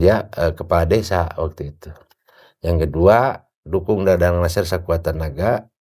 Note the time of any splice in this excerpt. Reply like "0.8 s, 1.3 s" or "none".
none

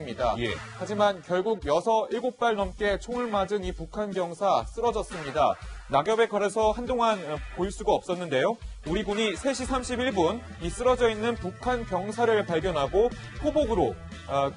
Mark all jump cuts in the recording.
4.1 s

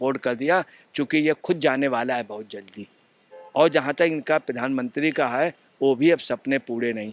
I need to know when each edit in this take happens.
none

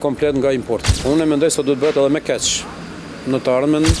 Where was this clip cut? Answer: 0.9 s

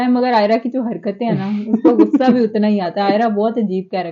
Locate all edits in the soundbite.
none

